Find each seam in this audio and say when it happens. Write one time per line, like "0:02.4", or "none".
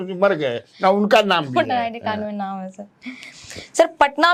none